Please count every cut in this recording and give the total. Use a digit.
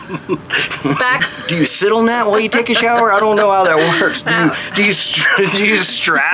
1